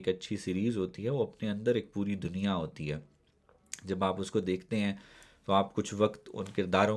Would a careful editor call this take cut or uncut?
uncut